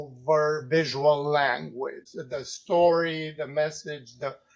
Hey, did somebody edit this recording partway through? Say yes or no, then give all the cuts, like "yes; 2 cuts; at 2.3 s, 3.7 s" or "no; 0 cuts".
yes; 1 cut; at 2.1 s